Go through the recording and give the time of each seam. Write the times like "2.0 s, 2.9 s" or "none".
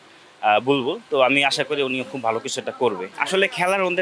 none